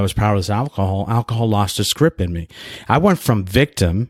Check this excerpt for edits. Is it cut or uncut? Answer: uncut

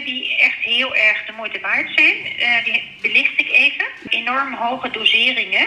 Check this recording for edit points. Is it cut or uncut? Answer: cut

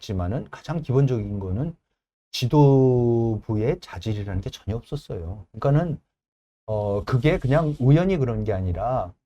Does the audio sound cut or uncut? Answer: uncut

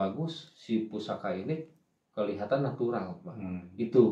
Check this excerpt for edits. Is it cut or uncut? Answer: uncut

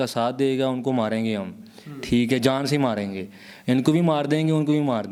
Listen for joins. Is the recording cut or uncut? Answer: uncut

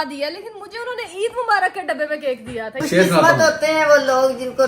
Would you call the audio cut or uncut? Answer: cut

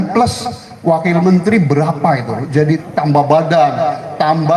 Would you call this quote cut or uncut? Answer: cut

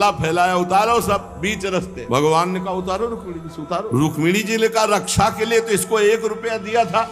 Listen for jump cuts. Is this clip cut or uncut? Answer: cut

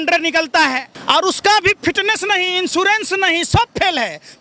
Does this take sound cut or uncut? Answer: cut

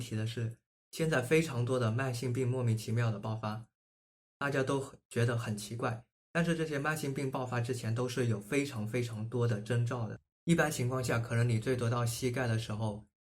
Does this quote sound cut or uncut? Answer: cut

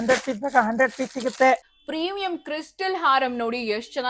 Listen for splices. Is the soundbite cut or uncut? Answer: cut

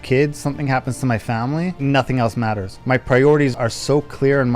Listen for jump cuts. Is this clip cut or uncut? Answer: cut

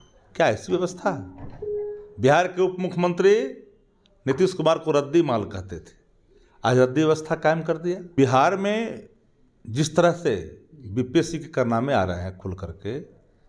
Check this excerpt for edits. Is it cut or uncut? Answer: cut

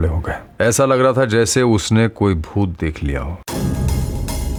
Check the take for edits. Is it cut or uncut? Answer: uncut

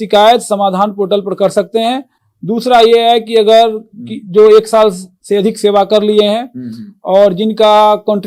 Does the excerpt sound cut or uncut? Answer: uncut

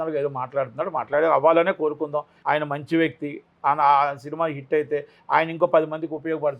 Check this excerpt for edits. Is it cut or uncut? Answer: cut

